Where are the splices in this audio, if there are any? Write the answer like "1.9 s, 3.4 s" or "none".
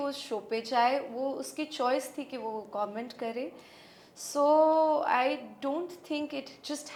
none